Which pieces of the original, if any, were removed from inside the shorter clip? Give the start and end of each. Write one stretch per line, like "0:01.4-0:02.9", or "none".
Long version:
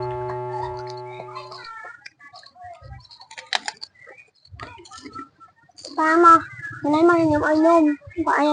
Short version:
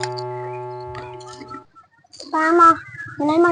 0:01.3-0:05.0